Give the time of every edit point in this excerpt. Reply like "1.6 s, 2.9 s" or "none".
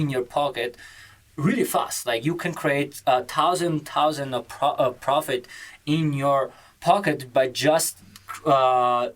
none